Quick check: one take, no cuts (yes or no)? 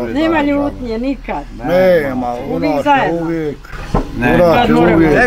yes